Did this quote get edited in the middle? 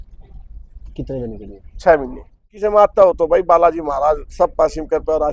yes; 1 cut; at 2.5 s

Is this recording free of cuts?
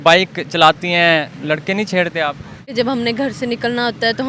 no; 2 cuts; at 1.3 s, 2.7 s

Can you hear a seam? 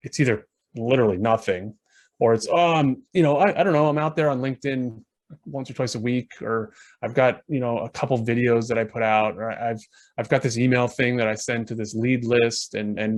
no; 0 cuts

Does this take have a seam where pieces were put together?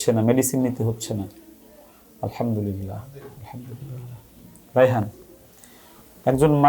no; 0 cuts

